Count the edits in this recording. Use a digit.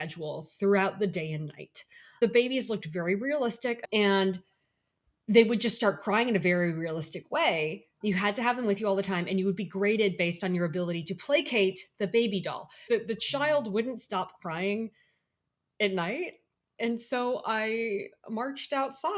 3